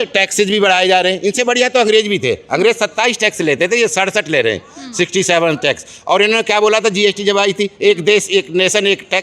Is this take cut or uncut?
uncut